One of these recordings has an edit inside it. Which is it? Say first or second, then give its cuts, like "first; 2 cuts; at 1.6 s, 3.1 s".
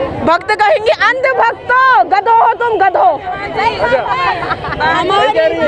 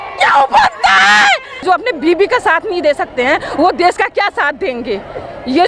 second; 1 cut; at 1.6 s